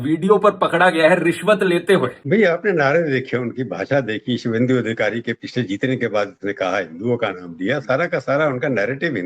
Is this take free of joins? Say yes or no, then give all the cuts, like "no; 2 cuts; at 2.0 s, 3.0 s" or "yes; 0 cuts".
no; 1 cut; at 2.2 s